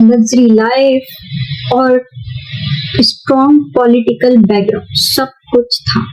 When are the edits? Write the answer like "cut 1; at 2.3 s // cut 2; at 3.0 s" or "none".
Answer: none